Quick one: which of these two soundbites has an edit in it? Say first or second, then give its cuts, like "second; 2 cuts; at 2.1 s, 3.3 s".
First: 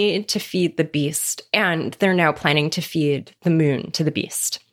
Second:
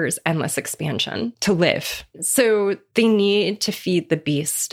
second; 2 cuts; at 1.4 s, 2.2 s